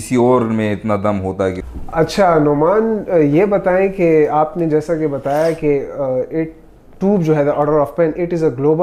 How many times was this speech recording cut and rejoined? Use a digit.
1